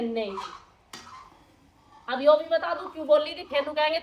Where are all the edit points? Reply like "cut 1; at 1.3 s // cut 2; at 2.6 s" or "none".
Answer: none

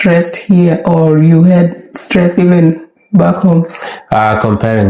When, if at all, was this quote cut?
none

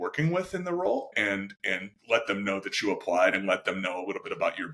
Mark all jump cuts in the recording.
cut 1; at 1.1 s

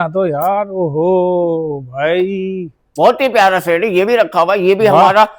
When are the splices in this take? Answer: none

